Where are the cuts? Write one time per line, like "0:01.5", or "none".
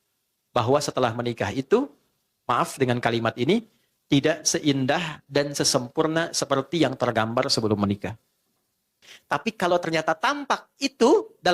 0:09.1